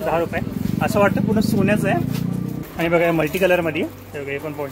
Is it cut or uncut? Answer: cut